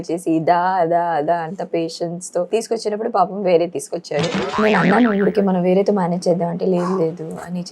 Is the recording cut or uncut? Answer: cut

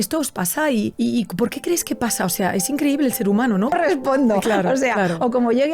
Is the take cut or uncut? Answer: cut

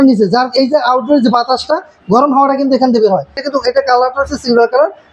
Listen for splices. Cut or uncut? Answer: cut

